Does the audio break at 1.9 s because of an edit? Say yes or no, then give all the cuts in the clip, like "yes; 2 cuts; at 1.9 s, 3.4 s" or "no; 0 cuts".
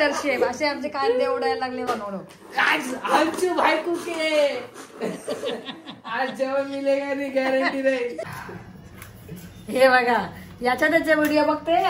yes; 2 cuts; at 1.9 s, 8.2 s